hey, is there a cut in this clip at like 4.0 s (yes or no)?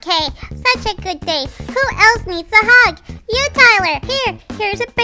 yes